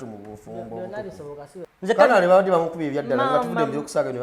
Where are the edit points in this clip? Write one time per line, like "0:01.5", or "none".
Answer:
0:01.6